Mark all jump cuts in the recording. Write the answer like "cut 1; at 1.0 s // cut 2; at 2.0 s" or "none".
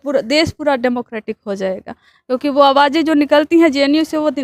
none